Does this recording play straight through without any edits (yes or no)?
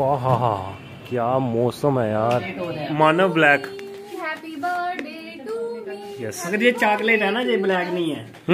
no